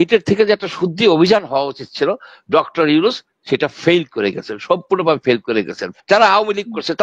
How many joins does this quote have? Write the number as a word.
one